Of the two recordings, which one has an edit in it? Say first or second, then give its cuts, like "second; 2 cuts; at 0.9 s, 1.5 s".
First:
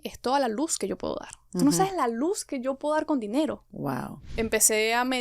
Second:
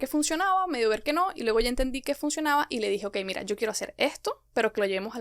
first; 1 cut; at 4.2 s